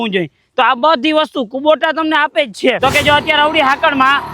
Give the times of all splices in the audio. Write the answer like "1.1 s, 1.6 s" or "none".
2.8 s